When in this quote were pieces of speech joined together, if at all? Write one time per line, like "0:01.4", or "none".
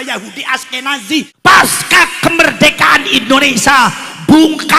0:01.3